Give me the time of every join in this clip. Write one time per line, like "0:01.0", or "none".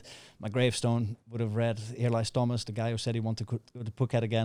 none